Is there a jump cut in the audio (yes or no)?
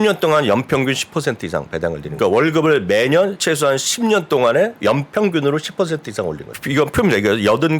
yes